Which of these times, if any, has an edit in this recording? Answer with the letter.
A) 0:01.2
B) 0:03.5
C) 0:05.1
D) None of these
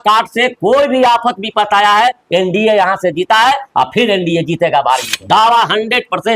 C